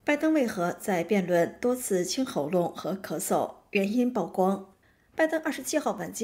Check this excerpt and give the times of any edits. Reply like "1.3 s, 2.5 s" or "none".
none